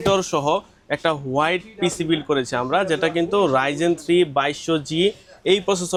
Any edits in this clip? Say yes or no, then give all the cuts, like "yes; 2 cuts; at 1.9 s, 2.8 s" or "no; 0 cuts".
no; 0 cuts